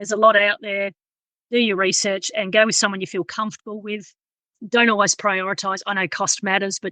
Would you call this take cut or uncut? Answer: uncut